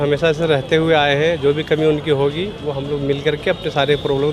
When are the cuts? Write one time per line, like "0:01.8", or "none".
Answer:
none

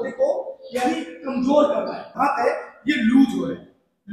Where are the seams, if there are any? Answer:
0:02.1

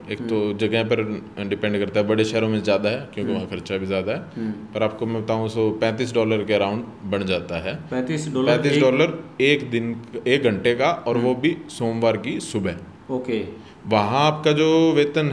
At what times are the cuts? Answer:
none

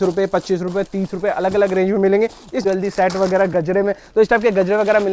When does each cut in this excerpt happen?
0:02.6

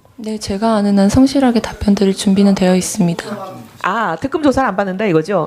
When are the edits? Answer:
0:03.9

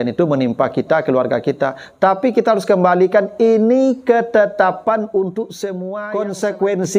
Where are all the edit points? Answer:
0:06.0

